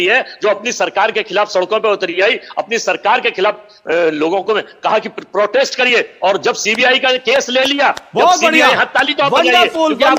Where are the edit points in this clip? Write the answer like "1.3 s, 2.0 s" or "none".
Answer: none